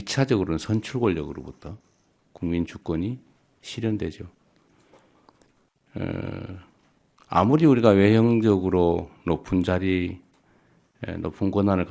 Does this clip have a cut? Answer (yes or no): no